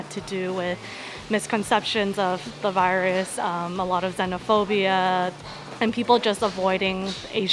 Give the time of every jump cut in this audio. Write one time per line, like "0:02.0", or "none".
0:05.5